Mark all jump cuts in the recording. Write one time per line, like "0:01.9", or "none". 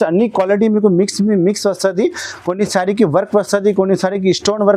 none